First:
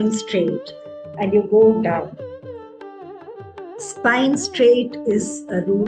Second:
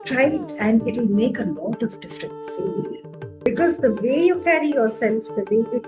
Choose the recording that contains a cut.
second; 1 cut; at 3.5 s

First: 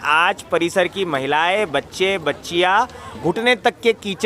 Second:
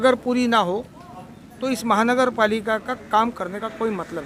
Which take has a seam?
first; 1 cut; at 3.2 s

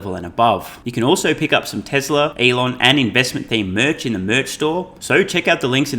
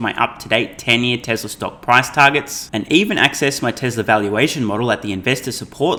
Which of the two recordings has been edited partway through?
first; 3 cuts; at 0.8 s, 2.3 s, 5.0 s

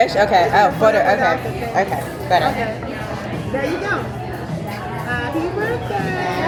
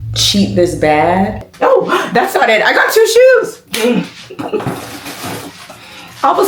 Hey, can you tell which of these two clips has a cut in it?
second; 1 cut; at 1.5 s

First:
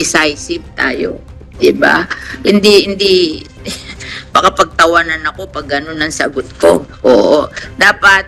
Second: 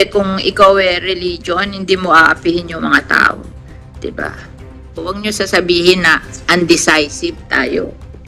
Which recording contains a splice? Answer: second; 1 cut; at 4.9 s

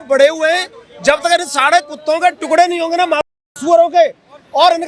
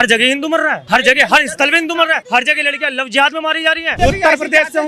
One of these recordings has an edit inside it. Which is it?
second; 3 cuts; at 0.8 s, 2.2 s, 4.0 s

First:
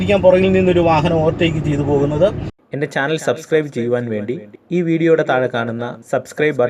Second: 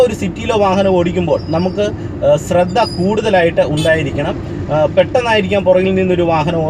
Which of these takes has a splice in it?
first; 1 cut; at 2.5 s

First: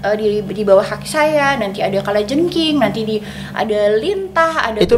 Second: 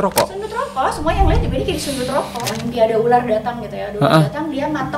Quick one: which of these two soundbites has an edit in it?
second; 1 cut; at 2.5 s

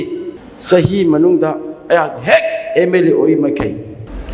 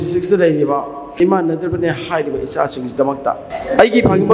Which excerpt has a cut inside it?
second; 2 cuts; at 1.2 s, 3.5 s

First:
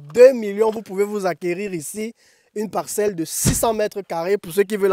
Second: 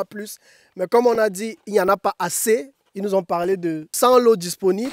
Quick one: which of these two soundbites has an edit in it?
second; 1 cut; at 3.9 s

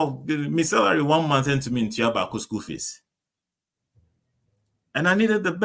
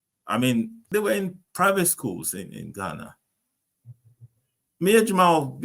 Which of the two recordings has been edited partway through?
second; 1 cut; at 1.2 s

